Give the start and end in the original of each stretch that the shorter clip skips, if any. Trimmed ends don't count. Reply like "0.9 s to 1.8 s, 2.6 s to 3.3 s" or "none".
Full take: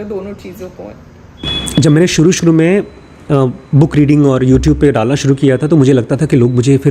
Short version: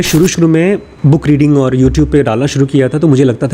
3.0 s to 3.6 s